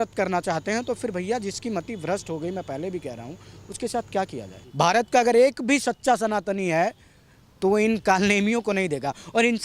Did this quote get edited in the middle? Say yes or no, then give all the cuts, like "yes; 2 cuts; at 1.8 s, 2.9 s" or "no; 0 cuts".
yes; 1 cut; at 4.6 s